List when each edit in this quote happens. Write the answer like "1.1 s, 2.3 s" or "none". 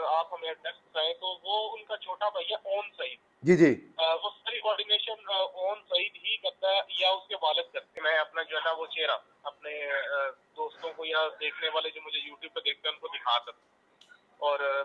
7.8 s